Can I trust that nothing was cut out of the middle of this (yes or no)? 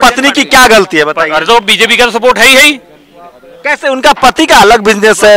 yes